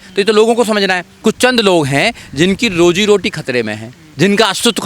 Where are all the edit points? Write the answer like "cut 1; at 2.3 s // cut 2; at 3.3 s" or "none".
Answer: cut 1; at 1.1 s